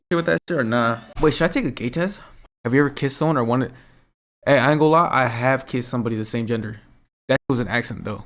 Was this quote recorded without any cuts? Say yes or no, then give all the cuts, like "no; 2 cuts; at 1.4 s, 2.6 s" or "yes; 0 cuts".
no; 1 cut; at 1.1 s